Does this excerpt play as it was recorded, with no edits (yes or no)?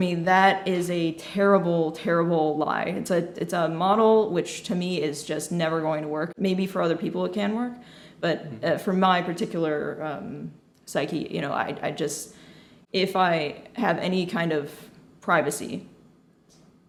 yes